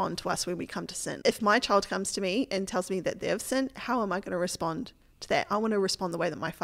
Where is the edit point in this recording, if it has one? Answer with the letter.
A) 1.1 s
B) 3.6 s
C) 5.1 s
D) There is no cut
A